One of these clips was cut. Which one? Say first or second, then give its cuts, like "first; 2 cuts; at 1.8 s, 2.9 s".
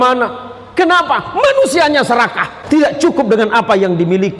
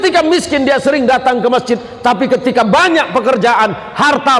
first; 1 cut; at 2.5 s